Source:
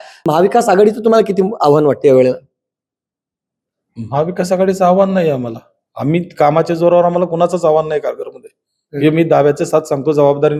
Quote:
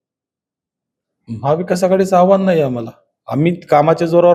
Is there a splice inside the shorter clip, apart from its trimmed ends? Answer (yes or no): no